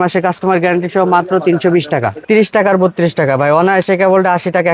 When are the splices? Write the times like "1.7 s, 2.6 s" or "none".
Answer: 2.1 s